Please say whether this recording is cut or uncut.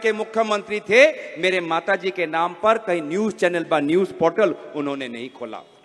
uncut